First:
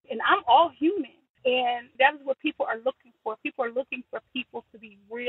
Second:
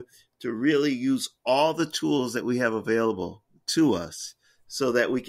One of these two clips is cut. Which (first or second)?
first